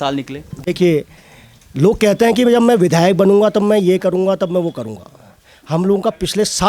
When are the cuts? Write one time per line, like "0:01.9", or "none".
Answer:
none